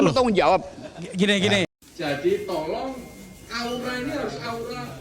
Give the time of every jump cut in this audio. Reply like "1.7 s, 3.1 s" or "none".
1.7 s